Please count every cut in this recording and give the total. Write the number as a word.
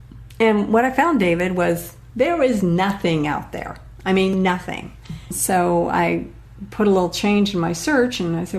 one